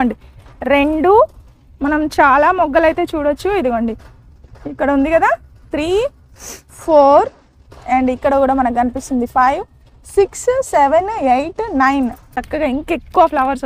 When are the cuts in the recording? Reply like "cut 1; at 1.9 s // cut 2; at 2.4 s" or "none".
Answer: cut 1; at 12.4 s